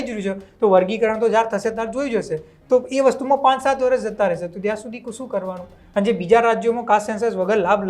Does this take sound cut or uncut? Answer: uncut